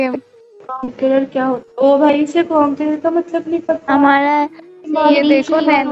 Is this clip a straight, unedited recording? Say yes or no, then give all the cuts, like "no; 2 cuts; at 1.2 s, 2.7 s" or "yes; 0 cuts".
yes; 0 cuts